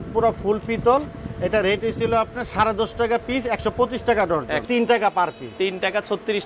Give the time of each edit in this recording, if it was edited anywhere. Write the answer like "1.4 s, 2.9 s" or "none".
4.6 s